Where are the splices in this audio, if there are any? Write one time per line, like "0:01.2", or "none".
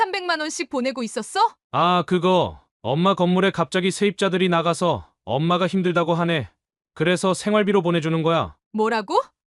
0:01.6